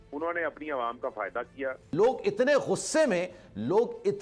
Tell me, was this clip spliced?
yes; 1 cut; at 1.8 s

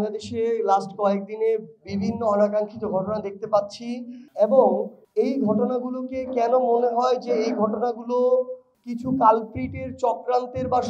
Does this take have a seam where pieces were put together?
no; 0 cuts

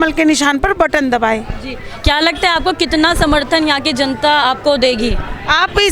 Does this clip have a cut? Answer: no; 0 cuts

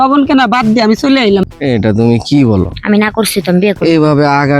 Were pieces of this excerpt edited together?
yes; 1 cut; at 1.4 s

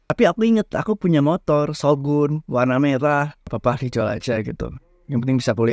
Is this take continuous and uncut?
no; 1 cut; at 3.5 s

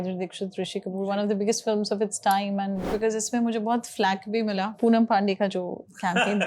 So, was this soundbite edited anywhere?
yes; 2 cuts; at 2.9 s, 4.8 s

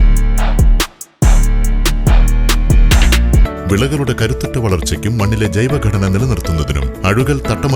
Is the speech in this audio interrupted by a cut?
yes; 1 cut; at 3.5 s

